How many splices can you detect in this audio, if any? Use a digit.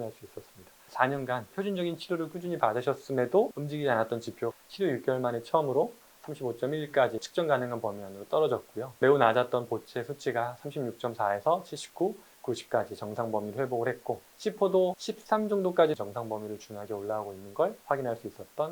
7